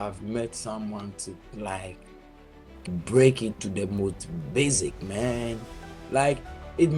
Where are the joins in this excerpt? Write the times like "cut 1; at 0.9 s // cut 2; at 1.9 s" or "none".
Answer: none